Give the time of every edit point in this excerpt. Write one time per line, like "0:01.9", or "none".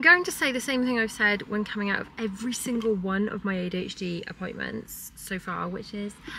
none

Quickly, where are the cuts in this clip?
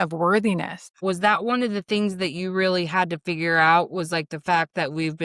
0:01.0

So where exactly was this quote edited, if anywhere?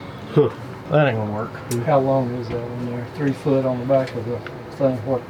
0:01.7

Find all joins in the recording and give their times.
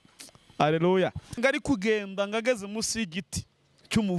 0:01.4

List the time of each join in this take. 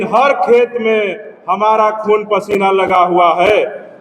none

